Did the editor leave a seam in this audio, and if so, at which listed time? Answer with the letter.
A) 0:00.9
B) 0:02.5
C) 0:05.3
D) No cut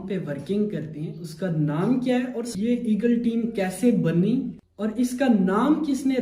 B